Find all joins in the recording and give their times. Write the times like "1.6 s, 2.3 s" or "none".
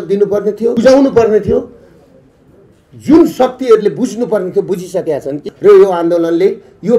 0.8 s, 5.5 s